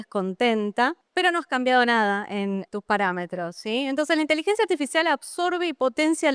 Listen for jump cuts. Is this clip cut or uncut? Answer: uncut